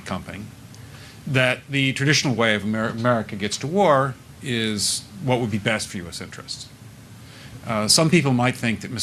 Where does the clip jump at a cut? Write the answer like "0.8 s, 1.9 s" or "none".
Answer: 7.0 s

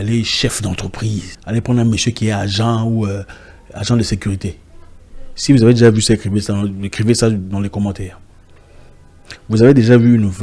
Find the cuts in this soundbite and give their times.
1.3 s

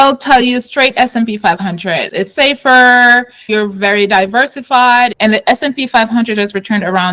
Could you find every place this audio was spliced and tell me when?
2.1 s, 3.5 s, 5.1 s

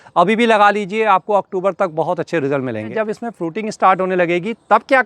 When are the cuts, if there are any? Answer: 2.9 s

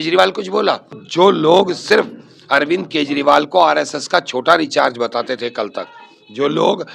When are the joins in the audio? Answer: 1.0 s

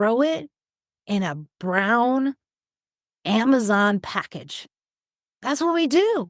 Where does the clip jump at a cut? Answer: none

